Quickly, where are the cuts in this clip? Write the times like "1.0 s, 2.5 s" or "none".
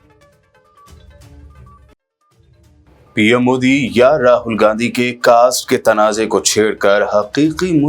1.2 s, 2.7 s